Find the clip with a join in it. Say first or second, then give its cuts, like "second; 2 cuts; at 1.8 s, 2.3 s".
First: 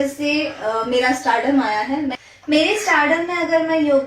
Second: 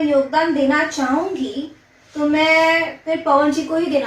first; 1 cut; at 2.2 s